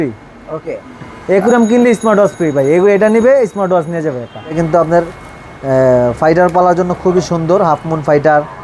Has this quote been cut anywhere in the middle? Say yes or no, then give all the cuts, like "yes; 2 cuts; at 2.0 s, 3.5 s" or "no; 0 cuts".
yes; 1 cut; at 4.6 s